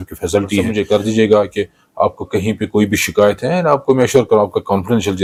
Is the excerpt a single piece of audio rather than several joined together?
yes; 0 cuts

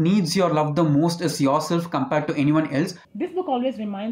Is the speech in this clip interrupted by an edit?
yes; 1 cut; at 3.0 s

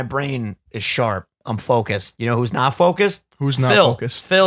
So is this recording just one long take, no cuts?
no; 1 cut; at 2.1 s

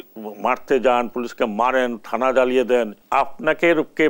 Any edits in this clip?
yes; 1 cut; at 3.0 s

